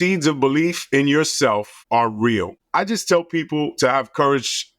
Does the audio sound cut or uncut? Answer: cut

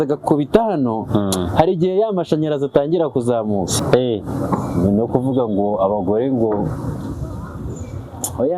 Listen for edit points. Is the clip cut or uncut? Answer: cut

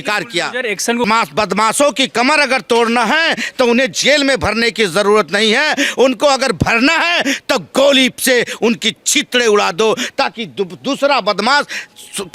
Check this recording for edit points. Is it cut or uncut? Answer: cut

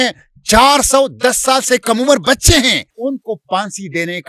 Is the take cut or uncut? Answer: cut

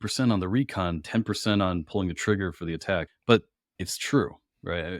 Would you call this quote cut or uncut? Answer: cut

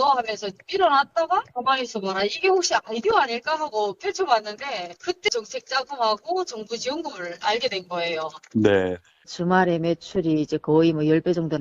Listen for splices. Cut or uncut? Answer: cut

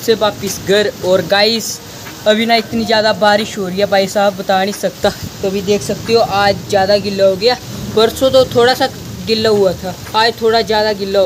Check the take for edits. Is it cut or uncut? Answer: cut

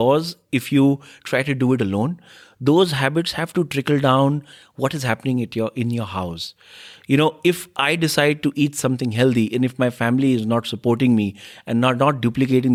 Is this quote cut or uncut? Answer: uncut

